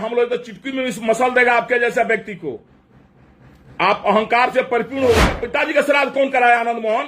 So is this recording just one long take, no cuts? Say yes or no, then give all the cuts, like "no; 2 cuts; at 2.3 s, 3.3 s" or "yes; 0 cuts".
no; 1 cut; at 5.4 s